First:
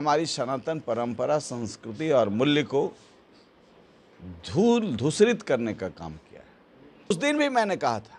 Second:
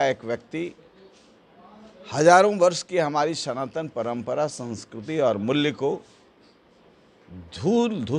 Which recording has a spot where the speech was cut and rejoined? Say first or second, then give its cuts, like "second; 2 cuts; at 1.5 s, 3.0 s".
first; 1 cut; at 7.2 s